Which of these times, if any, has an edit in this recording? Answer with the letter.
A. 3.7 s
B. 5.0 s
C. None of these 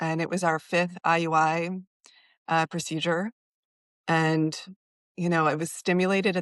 C